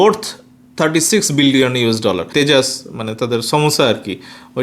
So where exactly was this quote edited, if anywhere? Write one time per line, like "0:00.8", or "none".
0:02.3